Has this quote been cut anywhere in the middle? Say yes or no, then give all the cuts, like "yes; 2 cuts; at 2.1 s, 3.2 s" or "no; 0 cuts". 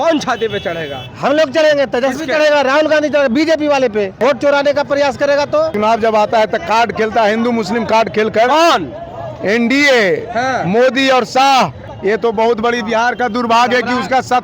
yes; 3 cuts; at 4.2 s, 5.7 s, 11.8 s